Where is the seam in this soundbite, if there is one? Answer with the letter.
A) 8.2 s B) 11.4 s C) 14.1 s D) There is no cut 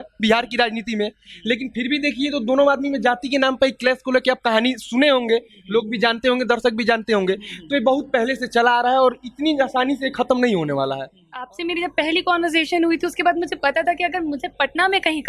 B